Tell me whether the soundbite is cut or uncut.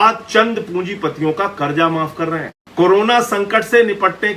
cut